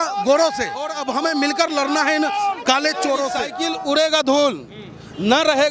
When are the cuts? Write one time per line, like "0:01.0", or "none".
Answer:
0:01.0
0:03.5